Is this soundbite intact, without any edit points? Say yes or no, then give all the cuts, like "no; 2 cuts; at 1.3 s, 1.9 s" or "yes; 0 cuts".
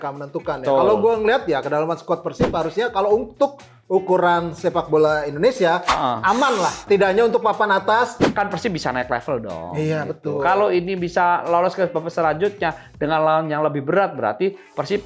no; 2 cuts; at 6.8 s, 8.2 s